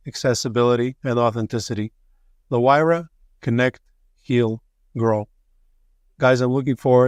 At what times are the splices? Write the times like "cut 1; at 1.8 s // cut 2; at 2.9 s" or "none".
none

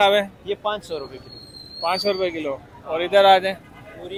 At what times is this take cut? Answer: none

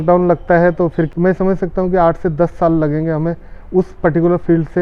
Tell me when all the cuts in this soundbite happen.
cut 1; at 1.1 s

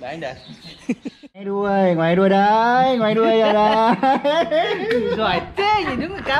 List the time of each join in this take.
cut 1; at 1.5 s

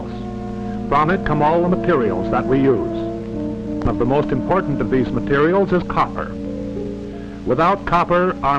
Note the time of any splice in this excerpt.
cut 1; at 7.2 s

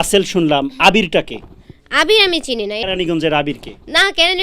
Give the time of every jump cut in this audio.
cut 1; at 2.8 s

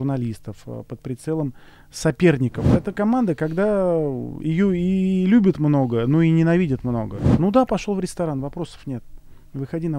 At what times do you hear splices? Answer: cut 1; at 2.7 s // cut 2; at 7.2 s

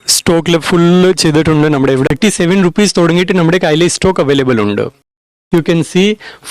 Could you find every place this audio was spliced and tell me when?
cut 1; at 2.1 s // cut 2; at 5.2 s

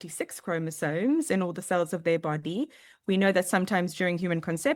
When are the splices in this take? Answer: none

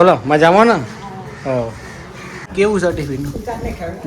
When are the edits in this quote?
cut 1; at 2.4 s

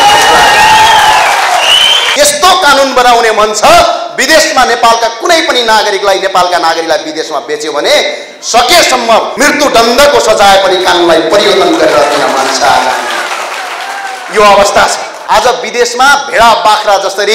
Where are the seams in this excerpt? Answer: cut 1; at 2.0 s // cut 2; at 9.3 s // cut 3; at 15.1 s

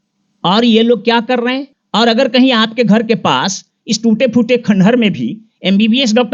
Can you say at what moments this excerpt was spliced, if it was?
cut 1; at 1.7 s

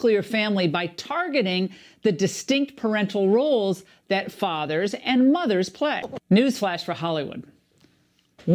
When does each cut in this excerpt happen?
cut 1; at 6.1 s

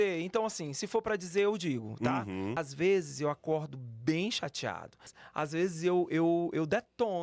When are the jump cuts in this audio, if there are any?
cut 1; at 2.6 s // cut 2; at 5.1 s

